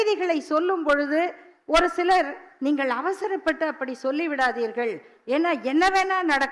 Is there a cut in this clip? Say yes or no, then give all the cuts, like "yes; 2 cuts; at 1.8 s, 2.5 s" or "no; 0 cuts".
no; 0 cuts